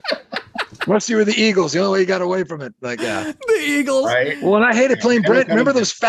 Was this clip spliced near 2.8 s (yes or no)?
no